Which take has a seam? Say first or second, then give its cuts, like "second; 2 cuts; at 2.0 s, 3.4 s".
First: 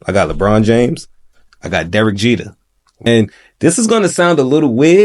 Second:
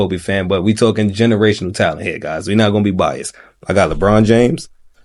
first; 1 cut; at 3.1 s